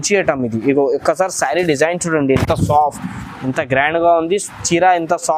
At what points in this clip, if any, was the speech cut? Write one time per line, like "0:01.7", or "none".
none